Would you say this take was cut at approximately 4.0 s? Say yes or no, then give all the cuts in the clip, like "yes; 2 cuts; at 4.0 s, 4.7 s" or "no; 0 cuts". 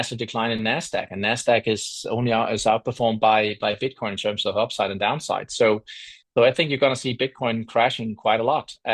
no; 0 cuts